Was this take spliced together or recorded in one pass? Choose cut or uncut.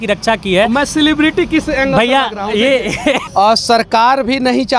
cut